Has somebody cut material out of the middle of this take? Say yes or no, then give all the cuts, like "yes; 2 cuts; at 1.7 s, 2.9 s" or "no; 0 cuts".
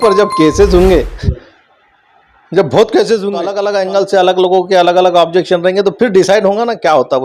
yes; 1 cut; at 3.5 s